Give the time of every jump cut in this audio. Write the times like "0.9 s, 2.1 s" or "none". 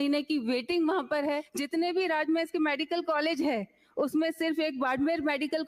1.5 s